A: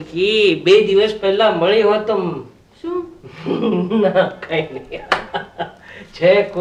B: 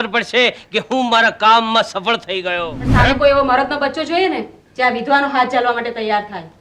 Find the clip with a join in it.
B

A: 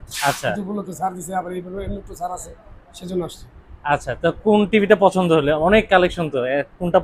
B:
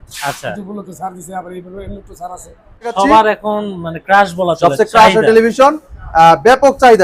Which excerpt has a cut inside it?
B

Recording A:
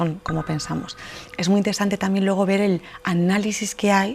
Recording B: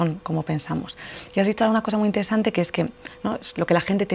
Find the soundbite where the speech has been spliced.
A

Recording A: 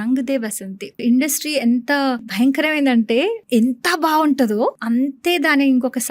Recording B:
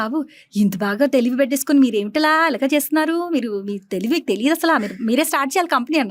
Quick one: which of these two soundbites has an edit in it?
A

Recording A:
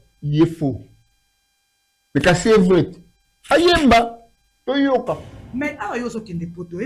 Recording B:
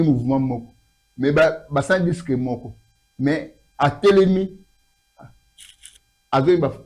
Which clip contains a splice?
A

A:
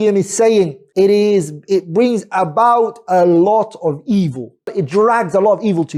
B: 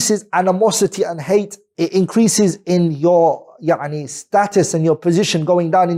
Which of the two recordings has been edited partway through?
A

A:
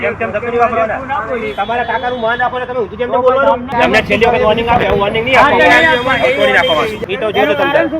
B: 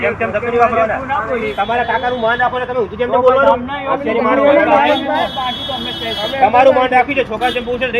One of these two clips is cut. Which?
A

